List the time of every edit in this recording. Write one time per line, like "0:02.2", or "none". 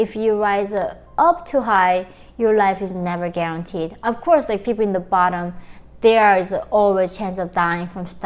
none